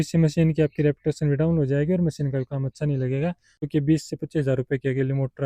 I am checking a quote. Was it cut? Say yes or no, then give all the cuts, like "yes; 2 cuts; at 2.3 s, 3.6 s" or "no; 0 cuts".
yes; 1 cut; at 3.7 s